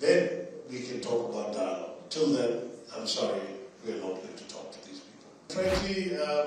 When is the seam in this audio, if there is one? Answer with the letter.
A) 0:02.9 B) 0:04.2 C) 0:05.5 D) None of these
C